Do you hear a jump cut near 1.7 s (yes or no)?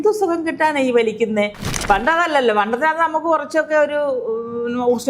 yes